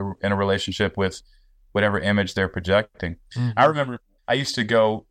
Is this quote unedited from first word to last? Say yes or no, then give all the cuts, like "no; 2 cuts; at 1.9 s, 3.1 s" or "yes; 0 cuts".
yes; 0 cuts